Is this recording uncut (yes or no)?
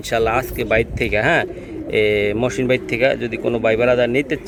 yes